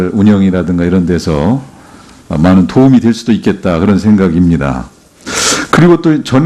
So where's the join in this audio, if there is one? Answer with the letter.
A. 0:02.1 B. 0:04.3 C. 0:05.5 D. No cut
B